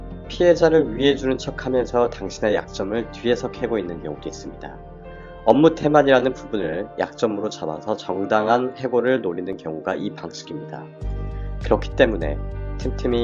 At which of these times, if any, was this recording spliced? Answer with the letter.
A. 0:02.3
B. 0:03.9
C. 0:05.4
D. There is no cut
D